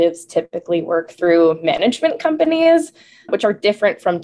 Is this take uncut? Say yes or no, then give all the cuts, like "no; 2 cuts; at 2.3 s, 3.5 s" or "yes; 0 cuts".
yes; 0 cuts